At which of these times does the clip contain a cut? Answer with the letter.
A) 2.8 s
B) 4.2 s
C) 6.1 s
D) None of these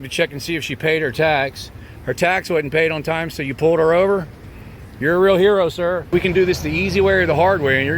C